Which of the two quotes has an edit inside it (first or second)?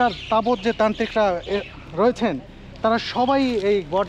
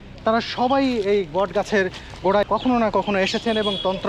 second